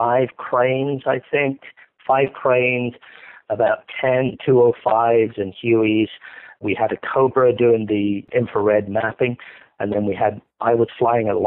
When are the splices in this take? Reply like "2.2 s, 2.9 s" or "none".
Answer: 6.6 s, 8.2 s